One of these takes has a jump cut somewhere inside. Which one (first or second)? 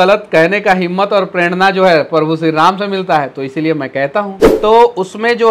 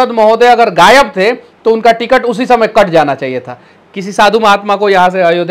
first